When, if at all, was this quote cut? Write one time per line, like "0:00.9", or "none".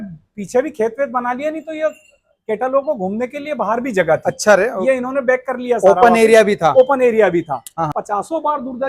0:07.9